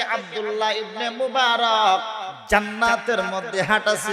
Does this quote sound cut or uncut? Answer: cut